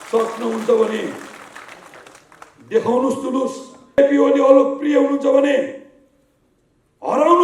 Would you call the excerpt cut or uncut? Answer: cut